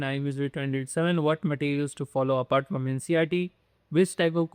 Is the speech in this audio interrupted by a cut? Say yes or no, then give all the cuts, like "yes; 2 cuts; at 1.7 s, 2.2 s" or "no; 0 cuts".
no; 0 cuts